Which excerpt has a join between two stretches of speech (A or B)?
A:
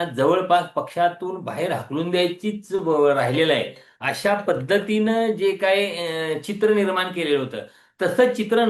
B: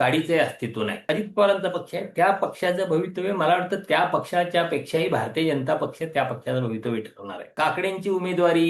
B